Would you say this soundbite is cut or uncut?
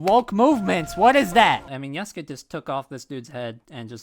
cut